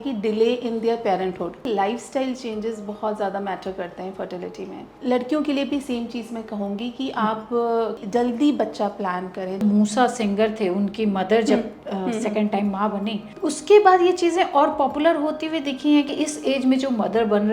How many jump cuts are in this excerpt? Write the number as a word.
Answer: six